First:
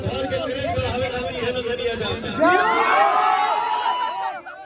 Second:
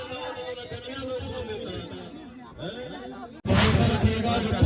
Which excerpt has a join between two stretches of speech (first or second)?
second